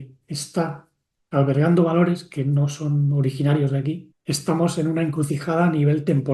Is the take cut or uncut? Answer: cut